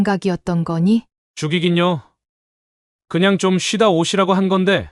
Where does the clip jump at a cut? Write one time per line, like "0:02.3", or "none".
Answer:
0:01.2

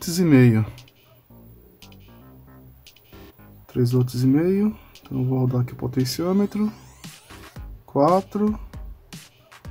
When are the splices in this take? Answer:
0:08.6

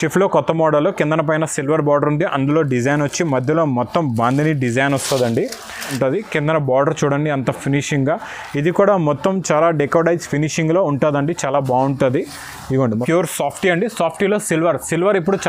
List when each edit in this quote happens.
0:05.9
0:13.0

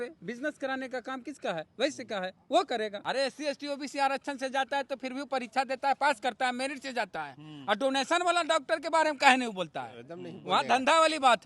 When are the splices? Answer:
0:03.0

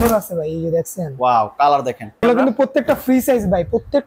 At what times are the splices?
0:02.2

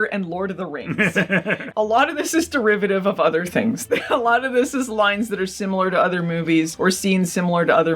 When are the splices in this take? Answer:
0:01.6
0:06.7

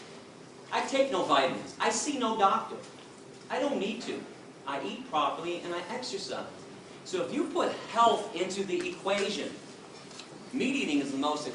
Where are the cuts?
0:05.4

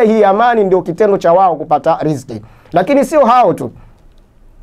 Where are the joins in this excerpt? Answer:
none

